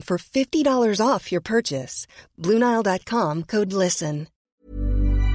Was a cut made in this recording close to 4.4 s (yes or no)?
yes